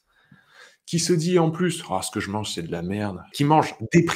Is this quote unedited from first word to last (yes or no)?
no